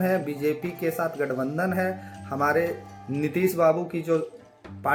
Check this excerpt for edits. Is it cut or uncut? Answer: uncut